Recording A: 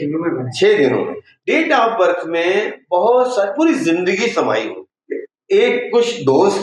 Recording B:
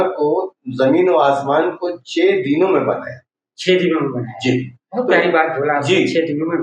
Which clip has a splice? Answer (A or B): A